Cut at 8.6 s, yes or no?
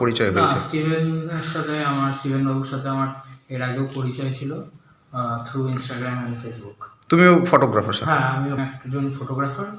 yes